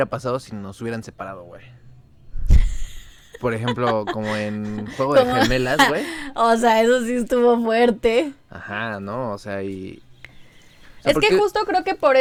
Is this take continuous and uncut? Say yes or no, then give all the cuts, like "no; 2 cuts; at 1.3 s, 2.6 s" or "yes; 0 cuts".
yes; 0 cuts